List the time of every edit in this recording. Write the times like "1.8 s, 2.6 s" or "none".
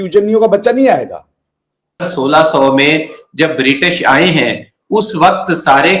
2.1 s